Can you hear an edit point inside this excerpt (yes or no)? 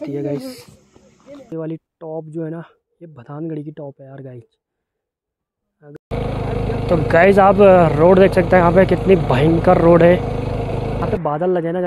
yes